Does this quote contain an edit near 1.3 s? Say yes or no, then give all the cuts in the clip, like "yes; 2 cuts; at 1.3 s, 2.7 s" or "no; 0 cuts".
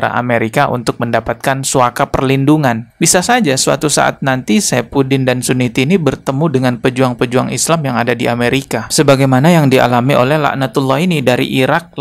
no; 1 cut; at 2.9 s